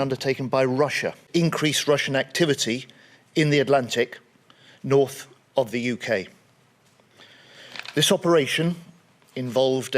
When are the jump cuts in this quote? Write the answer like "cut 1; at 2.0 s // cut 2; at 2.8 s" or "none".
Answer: cut 1; at 1.3 s